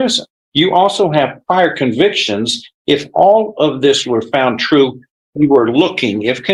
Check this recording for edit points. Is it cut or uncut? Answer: uncut